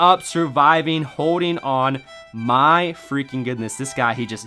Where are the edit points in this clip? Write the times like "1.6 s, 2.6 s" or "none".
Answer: none